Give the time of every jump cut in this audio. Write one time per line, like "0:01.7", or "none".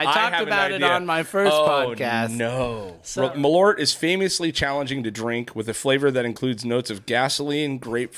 0:02.9